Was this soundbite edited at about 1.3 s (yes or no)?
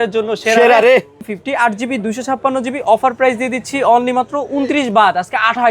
yes